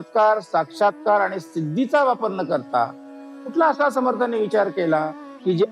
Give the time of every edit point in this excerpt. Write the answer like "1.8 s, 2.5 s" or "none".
none